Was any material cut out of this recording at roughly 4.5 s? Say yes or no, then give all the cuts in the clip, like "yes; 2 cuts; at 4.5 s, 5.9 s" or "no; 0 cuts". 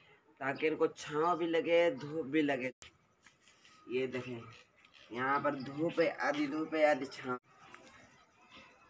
no; 2 cuts; at 2.7 s, 7.3 s